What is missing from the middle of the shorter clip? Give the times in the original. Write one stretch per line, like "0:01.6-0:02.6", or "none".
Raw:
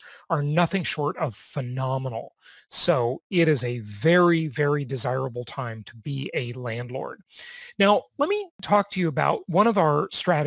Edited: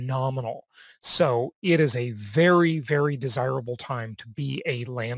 none